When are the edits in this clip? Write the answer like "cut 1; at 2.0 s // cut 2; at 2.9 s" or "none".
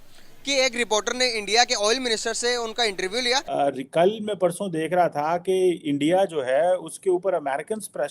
cut 1; at 3.5 s